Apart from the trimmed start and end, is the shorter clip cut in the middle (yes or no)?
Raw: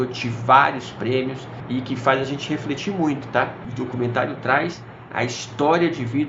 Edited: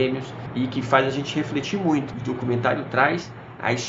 yes